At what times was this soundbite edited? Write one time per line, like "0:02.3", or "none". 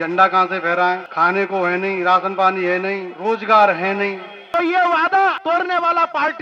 0:01.1
0:03.1
0:04.3
0:05.4